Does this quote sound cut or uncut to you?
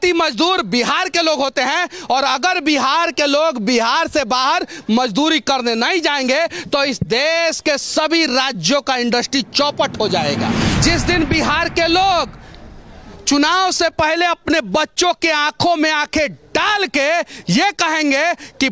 cut